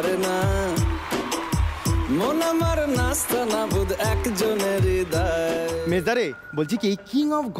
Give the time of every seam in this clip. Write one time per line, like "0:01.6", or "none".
0:05.8